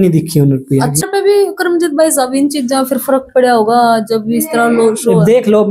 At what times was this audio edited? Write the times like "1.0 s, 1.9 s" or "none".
1.0 s

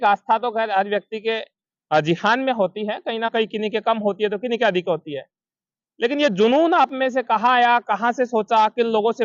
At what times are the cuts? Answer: none

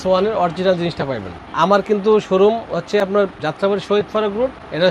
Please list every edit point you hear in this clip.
none

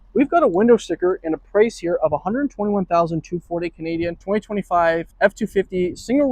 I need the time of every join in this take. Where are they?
4.2 s, 5.1 s

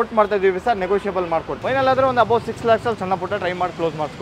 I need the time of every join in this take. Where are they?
1.5 s

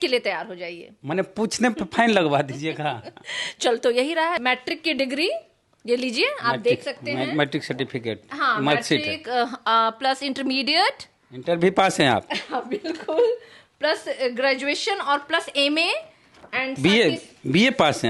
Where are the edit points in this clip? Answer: 4.4 s

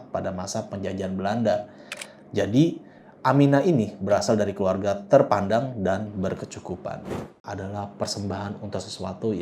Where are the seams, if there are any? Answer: 7.5 s

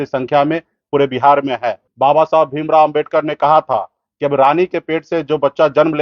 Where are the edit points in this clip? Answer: 1.8 s

